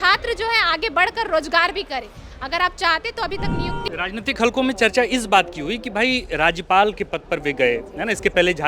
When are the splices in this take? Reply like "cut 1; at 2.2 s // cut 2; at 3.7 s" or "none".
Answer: cut 1; at 3.9 s